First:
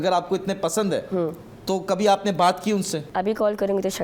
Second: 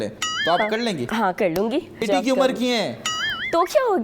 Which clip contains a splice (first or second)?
second